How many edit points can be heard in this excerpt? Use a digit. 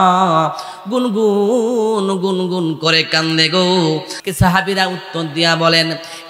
1